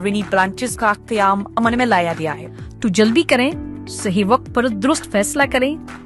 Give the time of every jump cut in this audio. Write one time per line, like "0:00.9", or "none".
0:02.4

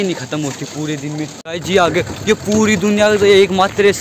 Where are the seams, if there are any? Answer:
0:01.5

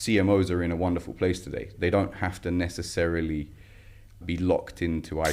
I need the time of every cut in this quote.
0:01.7
0:04.2

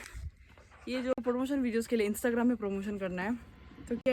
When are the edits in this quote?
none

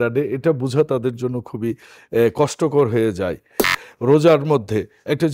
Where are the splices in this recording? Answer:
0:03.7

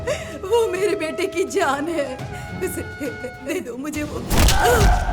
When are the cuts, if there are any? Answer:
0:03.3

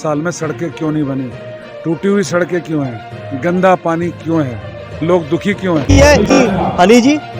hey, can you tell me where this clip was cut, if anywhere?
0:05.9

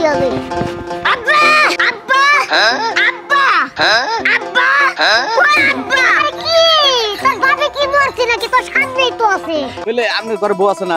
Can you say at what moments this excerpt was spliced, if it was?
0:01.8
0:09.7

